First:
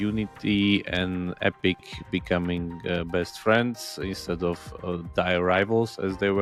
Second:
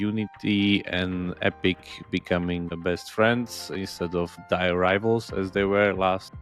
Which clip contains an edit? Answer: second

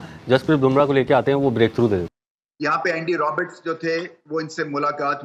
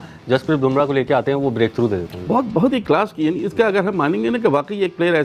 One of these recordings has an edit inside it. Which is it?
first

